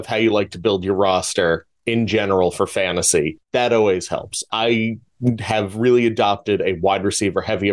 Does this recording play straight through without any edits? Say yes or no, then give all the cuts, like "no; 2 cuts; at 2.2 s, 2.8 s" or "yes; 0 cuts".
no; 2 cuts; at 3.4 s, 4.4 s